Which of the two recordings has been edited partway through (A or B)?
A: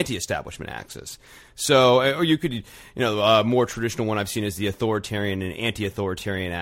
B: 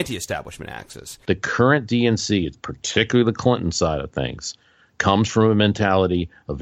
B